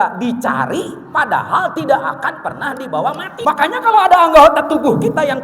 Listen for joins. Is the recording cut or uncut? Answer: cut